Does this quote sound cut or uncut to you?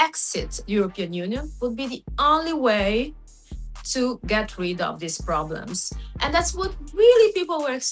uncut